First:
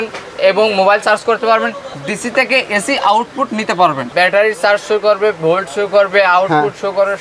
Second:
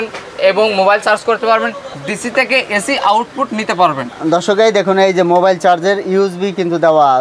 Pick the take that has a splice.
first; 1 cut; at 4.1 s

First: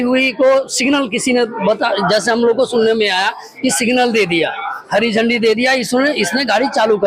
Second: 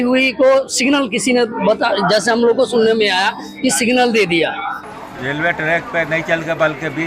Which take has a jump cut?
second; 1 cut; at 4.7 s

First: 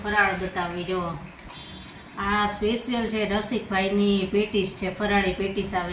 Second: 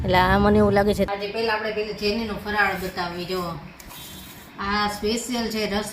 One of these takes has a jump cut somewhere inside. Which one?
second; 1 cut; at 1.1 s

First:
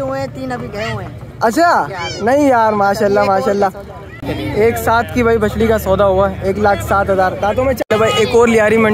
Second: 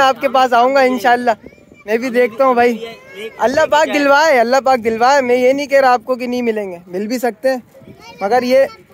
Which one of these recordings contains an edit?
first; 2 cuts; at 4.2 s, 7.8 s

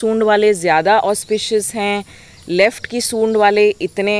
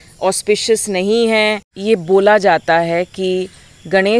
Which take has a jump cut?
second; 1 cut; at 1.7 s

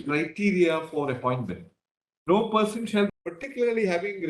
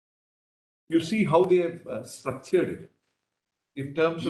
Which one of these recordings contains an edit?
first; 1 cut; at 3.1 s

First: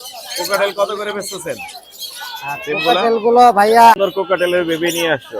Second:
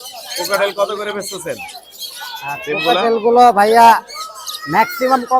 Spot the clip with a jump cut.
first; 1 cut; at 4.0 s

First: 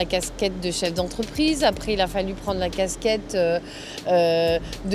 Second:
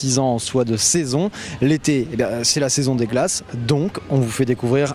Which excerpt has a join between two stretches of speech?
second; 1 cut; at 1.4 s

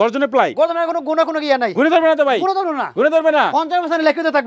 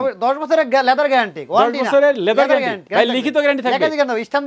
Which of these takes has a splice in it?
second; 1 cut; at 2.8 s

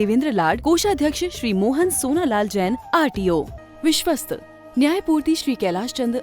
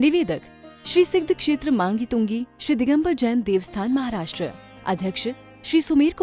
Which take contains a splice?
first; 1 cut; at 3.6 s

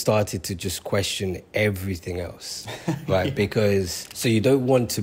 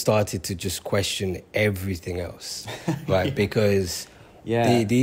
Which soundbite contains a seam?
first; 1 cut; at 4.0 s

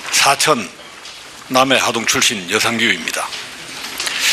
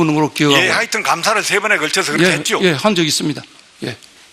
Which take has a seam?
second; 1 cut; at 3.4 s

